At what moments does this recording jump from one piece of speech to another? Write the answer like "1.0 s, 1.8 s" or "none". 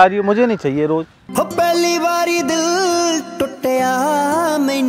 1.2 s